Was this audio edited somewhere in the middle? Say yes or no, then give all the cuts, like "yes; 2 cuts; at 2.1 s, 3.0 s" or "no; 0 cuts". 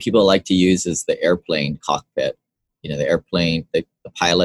no; 0 cuts